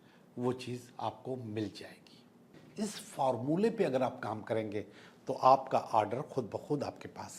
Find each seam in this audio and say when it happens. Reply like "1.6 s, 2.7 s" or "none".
2.6 s